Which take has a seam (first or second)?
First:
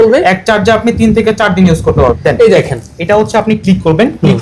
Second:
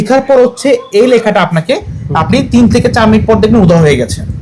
first